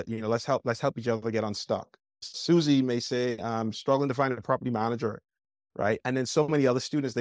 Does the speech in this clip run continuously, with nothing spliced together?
no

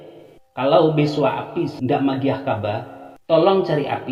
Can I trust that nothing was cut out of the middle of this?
yes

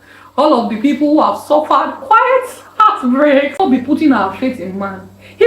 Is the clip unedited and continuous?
no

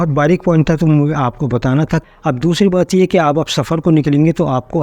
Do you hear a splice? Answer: yes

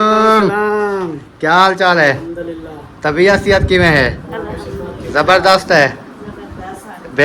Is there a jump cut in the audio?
no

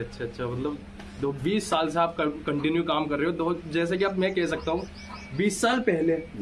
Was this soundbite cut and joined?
no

